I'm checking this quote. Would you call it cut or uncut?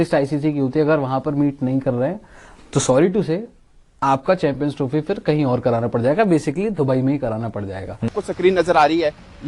cut